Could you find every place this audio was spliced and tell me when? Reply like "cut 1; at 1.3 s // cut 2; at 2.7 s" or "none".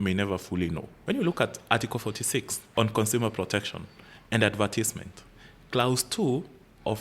cut 1; at 0.9 s // cut 2; at 2.6 s

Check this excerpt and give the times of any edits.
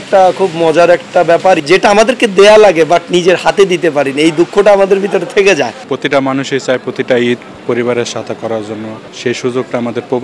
cut 1; at 1.6 s // cut 2; at 5.8 s // cut 3; at 9.0 s

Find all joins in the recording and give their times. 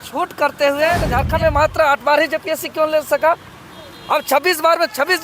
cut 1; at 1.1 s

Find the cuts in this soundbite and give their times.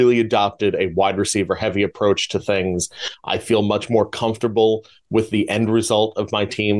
none

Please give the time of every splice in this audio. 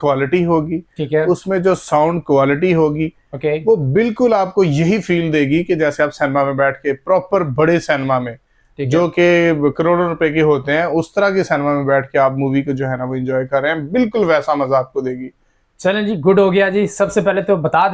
none

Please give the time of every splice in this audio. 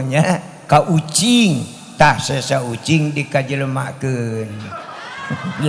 none

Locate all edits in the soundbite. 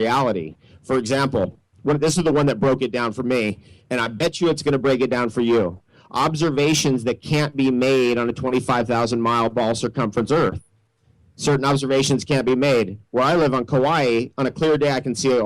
cut 1; at 14.3 s

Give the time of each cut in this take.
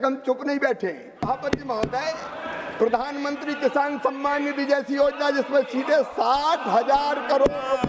cut 1; at 1.2 s

